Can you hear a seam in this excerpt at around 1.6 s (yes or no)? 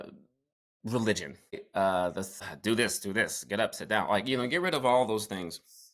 yes